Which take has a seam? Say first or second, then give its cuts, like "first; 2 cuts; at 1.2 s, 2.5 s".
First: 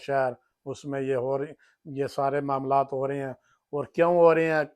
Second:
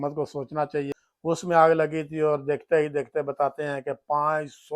second; 1 cut; at 1.0 s